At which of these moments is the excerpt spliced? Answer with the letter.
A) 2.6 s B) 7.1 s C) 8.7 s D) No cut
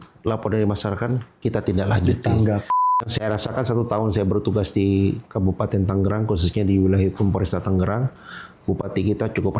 A